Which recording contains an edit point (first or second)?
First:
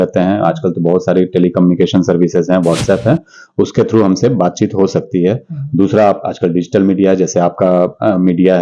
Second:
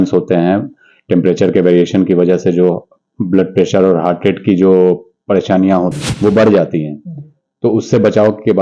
second